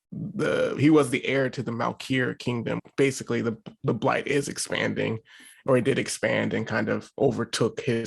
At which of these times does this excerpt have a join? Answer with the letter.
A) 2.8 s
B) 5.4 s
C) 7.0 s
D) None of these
A